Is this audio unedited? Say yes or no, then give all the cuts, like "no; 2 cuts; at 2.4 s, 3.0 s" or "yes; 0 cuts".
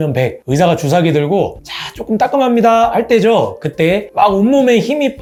yes; 0 cuts